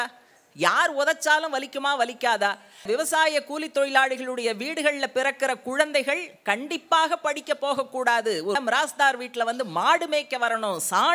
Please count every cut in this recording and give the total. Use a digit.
2